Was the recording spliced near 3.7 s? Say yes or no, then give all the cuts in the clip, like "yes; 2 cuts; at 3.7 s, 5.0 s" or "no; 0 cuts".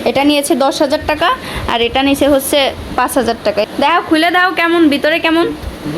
yes; 1 cut; at 3.7 s